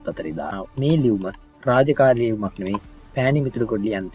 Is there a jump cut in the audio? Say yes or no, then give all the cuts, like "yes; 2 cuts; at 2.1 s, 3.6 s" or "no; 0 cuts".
no; 0 cuts